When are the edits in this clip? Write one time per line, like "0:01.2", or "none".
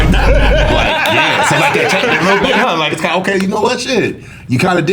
0:02.2